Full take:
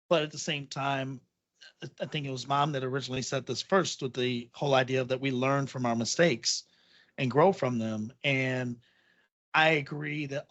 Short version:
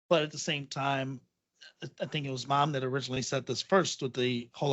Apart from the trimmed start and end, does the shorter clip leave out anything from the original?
no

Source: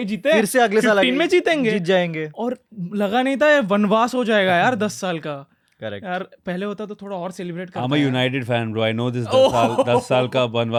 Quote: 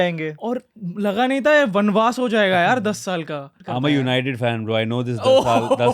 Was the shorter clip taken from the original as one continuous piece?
no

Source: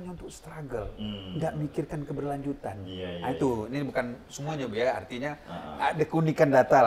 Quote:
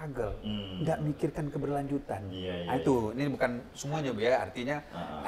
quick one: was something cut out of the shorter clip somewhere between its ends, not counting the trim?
no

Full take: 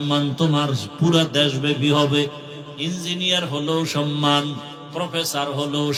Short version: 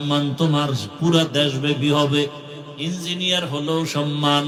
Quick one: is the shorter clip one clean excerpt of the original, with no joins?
yes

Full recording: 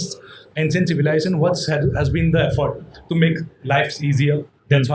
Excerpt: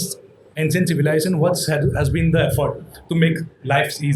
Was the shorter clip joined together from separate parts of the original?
no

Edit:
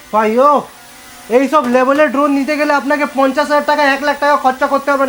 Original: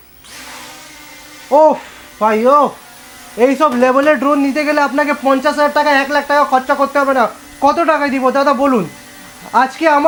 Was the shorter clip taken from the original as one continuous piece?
yes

